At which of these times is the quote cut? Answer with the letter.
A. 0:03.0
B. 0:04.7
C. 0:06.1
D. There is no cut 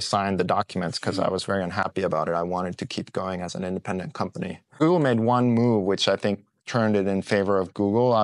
D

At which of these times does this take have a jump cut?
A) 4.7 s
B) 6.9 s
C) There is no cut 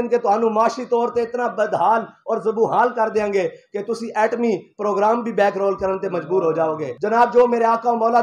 B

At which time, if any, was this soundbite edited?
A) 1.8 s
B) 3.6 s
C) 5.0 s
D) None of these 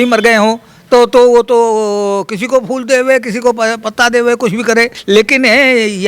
C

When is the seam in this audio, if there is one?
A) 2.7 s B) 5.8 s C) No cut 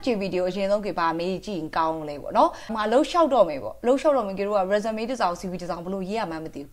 A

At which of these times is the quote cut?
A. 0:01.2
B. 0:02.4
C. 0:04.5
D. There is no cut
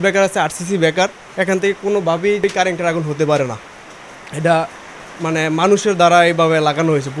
B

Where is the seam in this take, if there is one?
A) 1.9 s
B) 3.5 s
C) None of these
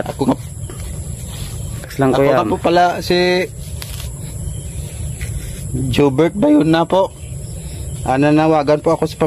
A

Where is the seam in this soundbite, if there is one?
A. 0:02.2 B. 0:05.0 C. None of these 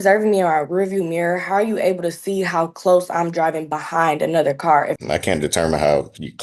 B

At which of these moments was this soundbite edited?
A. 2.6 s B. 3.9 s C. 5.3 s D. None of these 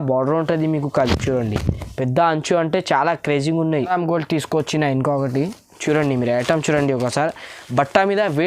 B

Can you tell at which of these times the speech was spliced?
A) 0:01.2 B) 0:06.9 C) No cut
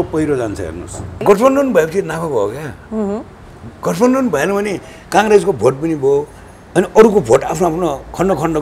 A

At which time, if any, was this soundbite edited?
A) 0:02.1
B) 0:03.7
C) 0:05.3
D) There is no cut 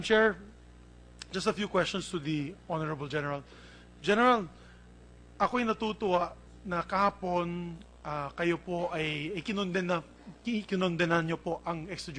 A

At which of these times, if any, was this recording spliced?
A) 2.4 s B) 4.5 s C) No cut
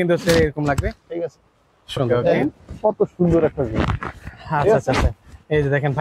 A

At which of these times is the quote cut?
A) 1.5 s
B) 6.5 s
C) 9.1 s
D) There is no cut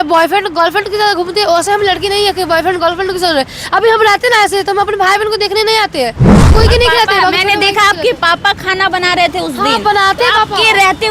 B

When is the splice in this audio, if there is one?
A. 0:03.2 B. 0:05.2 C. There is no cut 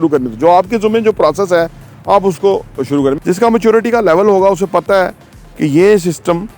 A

